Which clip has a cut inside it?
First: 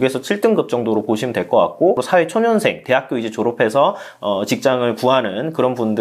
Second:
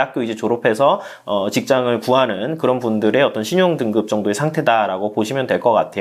first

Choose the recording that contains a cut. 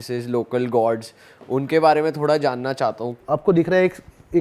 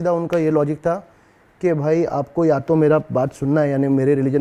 first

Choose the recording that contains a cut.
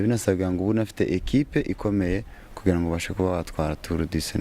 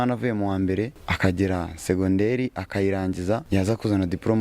second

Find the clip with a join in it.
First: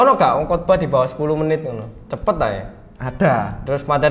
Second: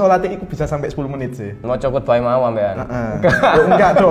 second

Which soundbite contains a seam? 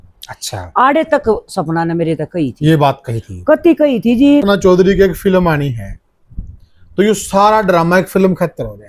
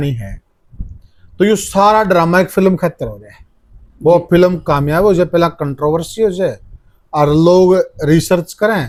first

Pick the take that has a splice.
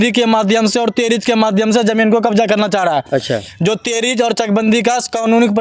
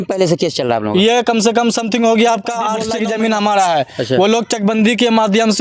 second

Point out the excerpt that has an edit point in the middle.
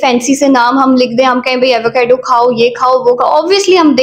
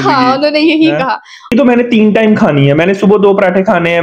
second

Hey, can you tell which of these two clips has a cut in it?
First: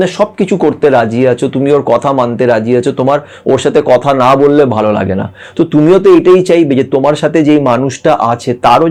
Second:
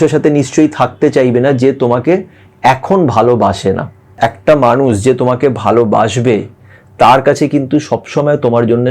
second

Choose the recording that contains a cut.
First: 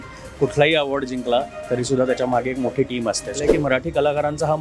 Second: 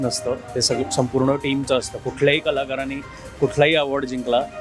first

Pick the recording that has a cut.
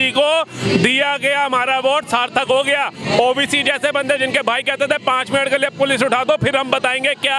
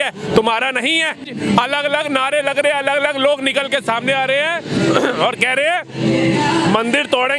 second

